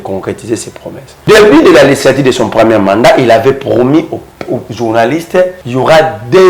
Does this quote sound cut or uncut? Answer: cut